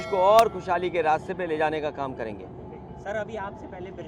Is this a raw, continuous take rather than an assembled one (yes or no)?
yes